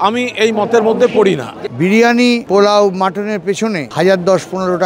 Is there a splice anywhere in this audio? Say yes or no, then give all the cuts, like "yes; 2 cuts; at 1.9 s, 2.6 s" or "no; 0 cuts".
yes; 3 cuts; at 1.5 s, 2.4 s, 3.9 s